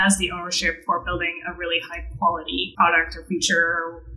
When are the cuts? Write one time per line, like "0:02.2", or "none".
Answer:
0:02.7